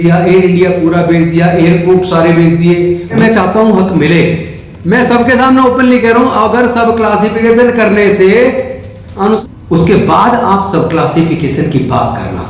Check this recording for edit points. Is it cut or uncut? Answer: cut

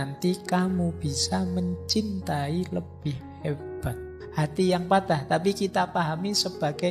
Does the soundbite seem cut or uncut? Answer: cut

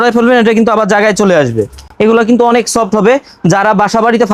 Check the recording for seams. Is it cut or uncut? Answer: uncut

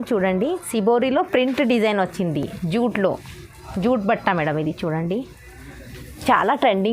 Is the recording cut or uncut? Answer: uncut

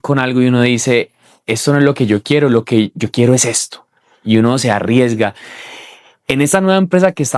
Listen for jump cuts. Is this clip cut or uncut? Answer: uncut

